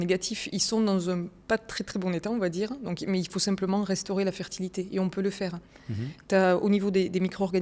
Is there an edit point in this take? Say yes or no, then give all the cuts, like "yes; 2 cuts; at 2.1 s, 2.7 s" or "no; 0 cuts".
no; 0 cuts